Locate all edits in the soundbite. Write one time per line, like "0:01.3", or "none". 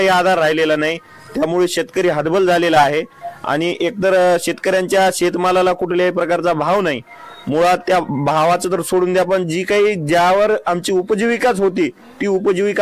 none